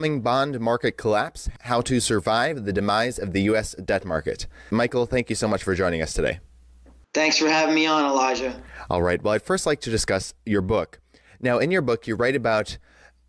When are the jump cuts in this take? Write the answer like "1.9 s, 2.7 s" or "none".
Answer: 2.4 s